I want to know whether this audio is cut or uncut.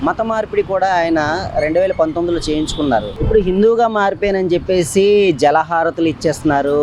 cut